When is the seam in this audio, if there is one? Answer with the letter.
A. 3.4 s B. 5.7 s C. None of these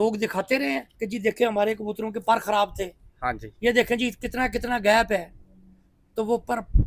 C